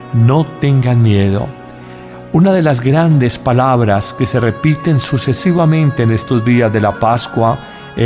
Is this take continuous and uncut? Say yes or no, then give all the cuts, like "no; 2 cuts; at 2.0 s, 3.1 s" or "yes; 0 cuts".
no; 1 cut; at 5.5 s